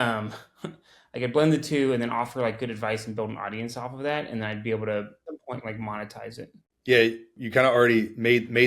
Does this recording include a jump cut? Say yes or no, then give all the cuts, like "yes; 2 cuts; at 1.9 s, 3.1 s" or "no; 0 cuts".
yes; 3 cuts; at 5.2 s, 6.6 s, 7.4 s